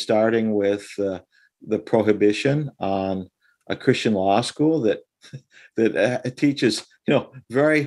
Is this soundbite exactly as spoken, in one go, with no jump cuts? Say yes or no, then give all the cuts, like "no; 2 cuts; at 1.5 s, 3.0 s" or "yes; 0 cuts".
yes; 0 cuts